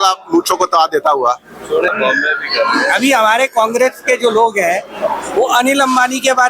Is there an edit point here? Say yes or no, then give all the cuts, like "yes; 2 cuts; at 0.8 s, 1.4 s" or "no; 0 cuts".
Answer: yes; 1 cut; at 1.9 s